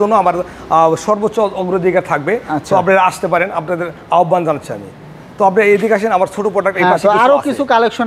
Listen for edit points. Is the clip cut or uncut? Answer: uncut